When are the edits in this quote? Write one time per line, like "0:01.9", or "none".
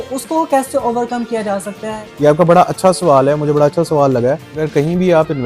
0:01.9
0:04.5